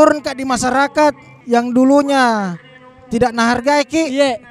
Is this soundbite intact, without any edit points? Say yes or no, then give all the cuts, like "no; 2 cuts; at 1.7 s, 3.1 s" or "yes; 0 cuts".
no; 1 cut; at 1.3 s